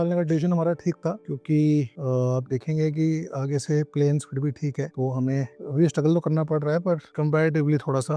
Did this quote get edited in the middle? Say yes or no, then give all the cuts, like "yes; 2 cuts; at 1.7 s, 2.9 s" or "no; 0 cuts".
no; 0 cuts